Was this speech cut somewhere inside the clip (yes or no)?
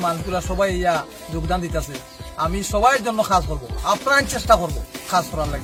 no